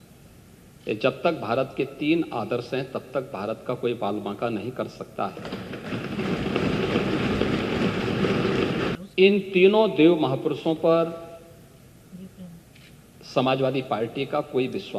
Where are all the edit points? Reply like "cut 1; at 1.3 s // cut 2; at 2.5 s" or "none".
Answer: cut 1; at 8.9 s